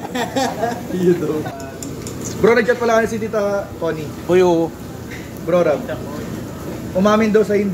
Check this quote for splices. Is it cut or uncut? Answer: cut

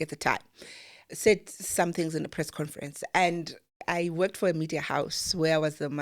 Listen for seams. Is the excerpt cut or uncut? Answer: cut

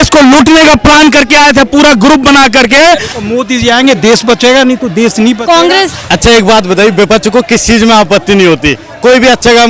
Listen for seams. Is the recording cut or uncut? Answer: cut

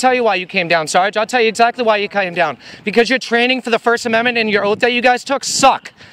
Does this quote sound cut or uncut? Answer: uncut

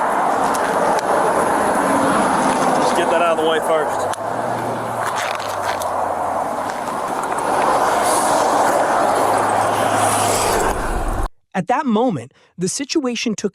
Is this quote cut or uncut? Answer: cut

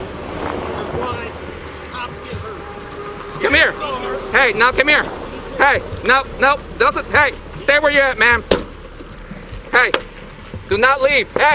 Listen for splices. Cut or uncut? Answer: uncut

